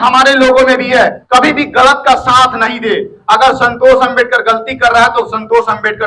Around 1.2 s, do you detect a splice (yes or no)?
yes